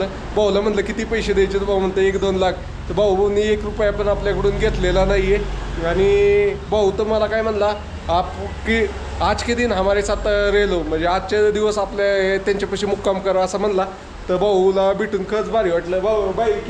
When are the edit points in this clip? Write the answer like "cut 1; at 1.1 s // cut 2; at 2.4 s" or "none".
none

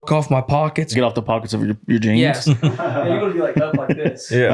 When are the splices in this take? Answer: cut 1; at 0.9 s // cut 2; at 2.4 s

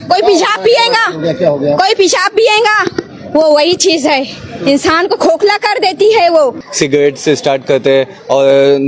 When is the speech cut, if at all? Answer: cut 1; at 6.6 s

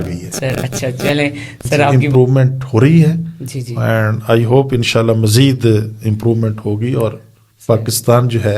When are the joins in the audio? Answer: cut 1; at 2.0 s

